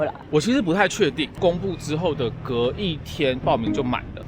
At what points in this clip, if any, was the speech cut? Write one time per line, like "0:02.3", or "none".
0:01.3